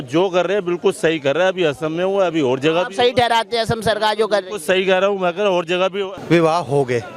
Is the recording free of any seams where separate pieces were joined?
yes; 0 cuts

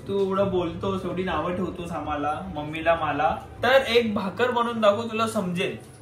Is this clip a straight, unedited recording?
no; 1 cut; at 3.5 s

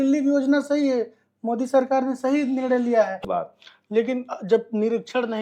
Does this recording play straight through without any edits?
no; 1 cut; at 3.1 s

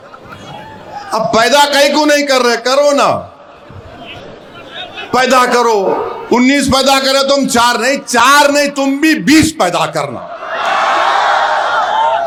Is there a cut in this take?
no; 0 cuts

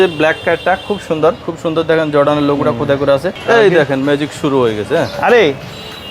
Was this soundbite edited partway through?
yes; 2 cuts; at 1.4 s, 3.3 s

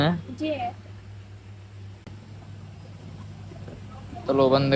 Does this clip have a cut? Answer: no; 0 cuts

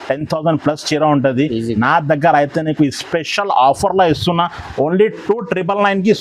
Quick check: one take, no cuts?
yes; 0 cuts

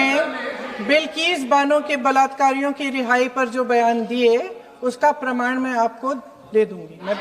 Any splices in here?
no; 0 cuts

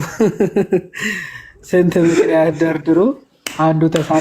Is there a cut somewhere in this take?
no; 0 cuts

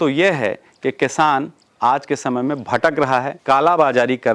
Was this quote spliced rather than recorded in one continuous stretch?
yes; 1 cut; at 3.3 s

